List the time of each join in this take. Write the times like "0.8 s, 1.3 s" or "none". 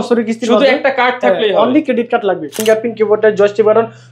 2.5 s

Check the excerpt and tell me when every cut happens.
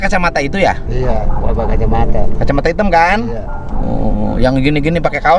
none

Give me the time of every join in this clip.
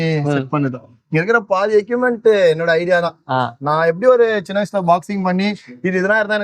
none

